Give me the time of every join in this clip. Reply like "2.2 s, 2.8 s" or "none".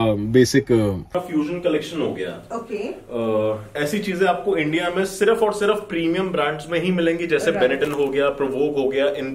1.2 s